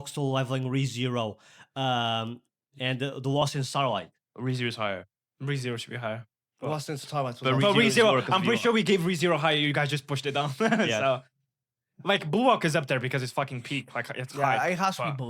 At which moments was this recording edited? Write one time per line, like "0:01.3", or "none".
none